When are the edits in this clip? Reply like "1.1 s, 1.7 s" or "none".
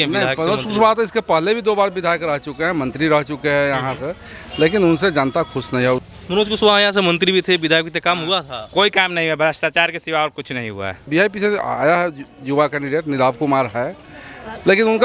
6.0 s, 11.1 s